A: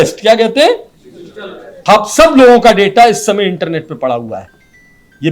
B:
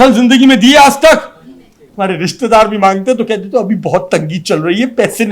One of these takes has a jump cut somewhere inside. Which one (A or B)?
A